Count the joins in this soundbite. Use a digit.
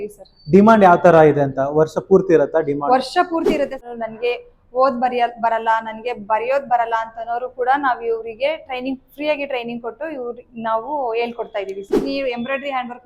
2